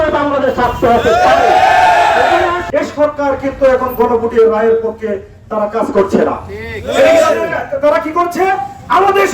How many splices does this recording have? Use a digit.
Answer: 1